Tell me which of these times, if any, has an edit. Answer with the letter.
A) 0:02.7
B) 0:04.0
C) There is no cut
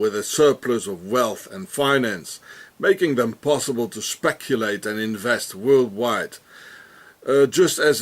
A